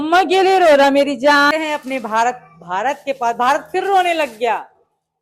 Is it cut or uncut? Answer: cut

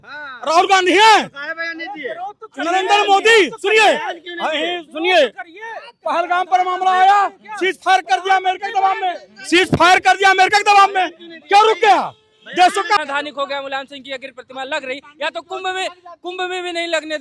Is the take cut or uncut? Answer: uncut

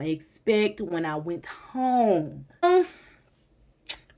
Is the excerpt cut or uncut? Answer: cut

